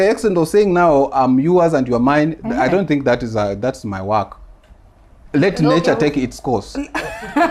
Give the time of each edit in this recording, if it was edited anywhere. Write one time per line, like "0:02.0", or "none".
none